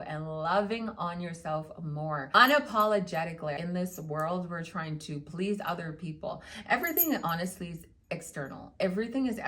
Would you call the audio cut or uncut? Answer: cut